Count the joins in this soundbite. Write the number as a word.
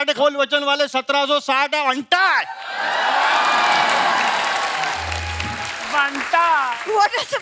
zero